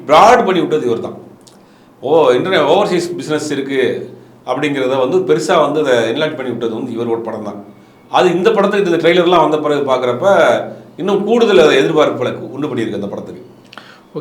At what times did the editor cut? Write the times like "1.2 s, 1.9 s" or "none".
none